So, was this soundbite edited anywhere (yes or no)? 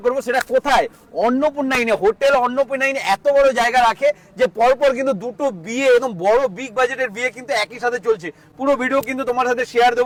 no